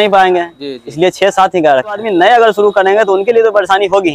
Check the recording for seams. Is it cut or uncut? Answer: cut